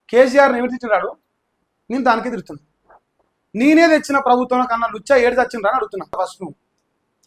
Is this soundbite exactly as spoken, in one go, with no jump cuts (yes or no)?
no